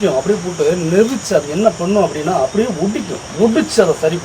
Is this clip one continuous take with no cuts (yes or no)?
no